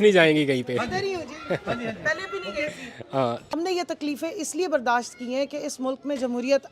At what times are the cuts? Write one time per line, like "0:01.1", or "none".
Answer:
0:03.5